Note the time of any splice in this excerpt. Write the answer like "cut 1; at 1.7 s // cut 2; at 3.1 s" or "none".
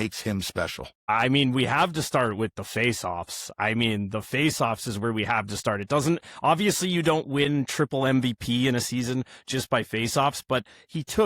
cut 1; at 1.1 s